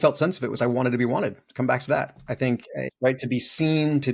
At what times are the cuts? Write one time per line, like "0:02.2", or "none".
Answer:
0:02.9